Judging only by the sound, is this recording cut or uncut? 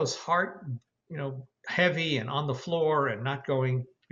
uncut